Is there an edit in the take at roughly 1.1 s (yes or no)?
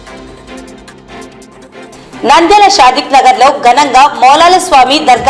yes